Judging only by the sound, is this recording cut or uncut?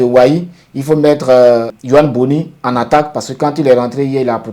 cut